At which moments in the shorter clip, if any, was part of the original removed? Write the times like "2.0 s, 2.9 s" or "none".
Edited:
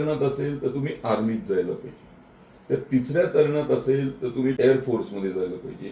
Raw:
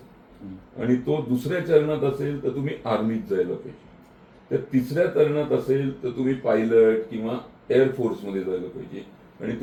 4.6 s